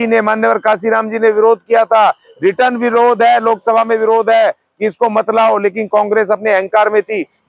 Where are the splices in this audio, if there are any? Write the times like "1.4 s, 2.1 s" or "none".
none